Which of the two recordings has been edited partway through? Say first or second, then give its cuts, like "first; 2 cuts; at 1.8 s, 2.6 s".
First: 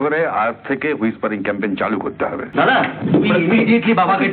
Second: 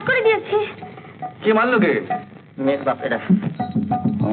first; 1 cut; at 2.5 s